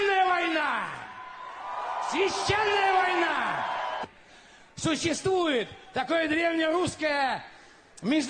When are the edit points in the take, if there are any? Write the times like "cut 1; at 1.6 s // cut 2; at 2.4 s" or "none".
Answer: none